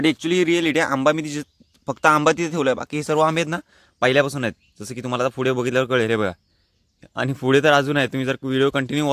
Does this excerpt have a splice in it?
no; 0 cuts

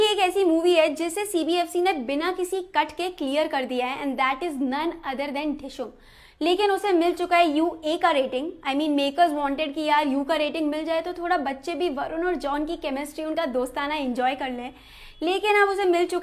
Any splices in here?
yes; 1 cut; at 6.8 s

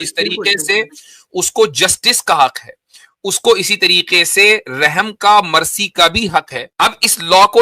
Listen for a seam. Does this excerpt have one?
yes; 1 cut; at 6.6 s

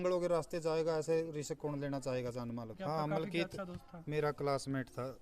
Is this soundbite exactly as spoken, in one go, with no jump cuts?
no; 1 cut; at 2.7 s

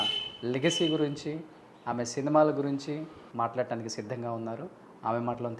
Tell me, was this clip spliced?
yes; 1 cut; at 3.2 s

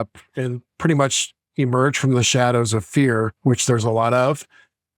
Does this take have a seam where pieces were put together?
no; 0 cuts

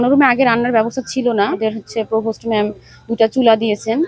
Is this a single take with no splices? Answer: no; 1 cut; at 1.6 s

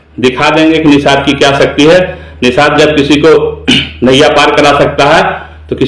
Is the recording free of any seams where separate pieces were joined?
yes; 0 cuts

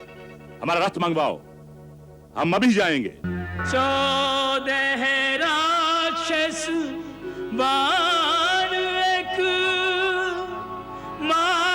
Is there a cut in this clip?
yes; 1 cut; at 3.4 s

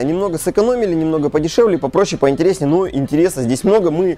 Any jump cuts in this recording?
no; 0 cuts

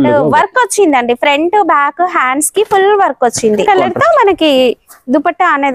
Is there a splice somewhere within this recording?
yes; 1 cut; at 3.6 s

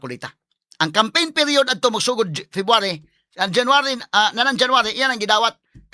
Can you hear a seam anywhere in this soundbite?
no; 0 cuts

